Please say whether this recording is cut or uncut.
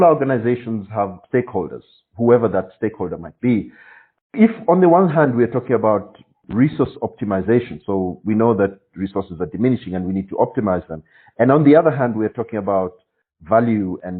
cut